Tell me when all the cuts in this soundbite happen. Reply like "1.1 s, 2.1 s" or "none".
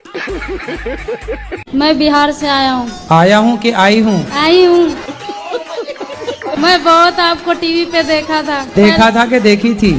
1.6 s